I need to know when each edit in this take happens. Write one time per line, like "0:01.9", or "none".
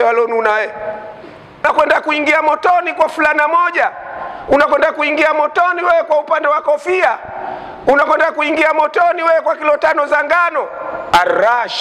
0:01.6